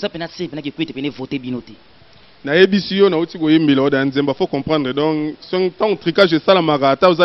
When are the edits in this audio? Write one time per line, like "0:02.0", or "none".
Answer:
none

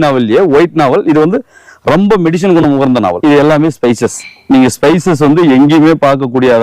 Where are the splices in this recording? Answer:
0:03.2

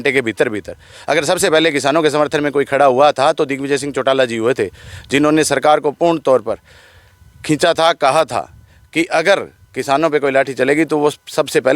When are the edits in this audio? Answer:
none

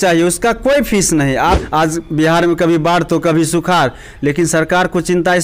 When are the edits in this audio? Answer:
0:01.6

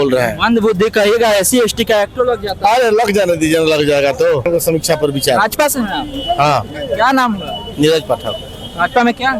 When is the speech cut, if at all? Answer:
0:04.5

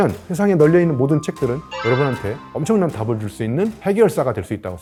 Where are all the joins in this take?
none

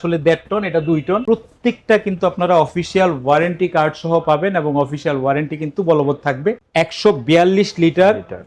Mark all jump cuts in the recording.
0:01.2
0:06.6

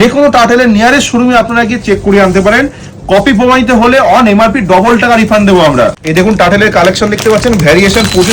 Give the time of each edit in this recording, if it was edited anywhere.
0:06.0

